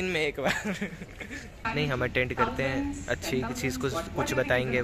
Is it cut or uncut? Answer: cut